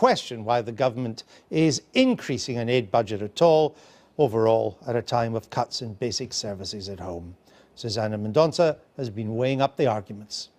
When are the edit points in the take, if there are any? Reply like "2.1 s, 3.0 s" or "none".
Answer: 1.8 s